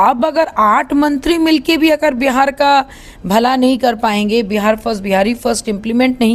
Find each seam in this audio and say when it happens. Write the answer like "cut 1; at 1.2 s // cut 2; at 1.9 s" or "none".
none